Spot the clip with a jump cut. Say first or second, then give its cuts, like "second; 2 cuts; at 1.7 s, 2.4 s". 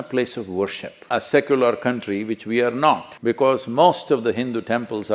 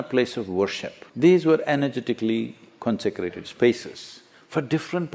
first; 1 cut; at 1.0 s